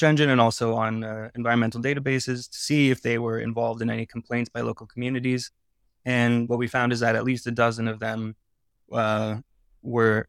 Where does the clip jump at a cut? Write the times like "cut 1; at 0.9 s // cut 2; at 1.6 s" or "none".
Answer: none